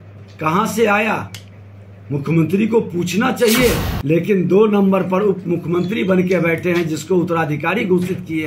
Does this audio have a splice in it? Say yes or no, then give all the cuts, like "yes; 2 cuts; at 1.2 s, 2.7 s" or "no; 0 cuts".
yes; 1 cut; at 3.9 s